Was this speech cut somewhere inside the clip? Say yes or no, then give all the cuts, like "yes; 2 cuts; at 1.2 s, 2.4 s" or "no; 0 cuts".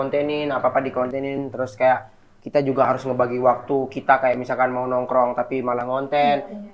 no; 0 cuts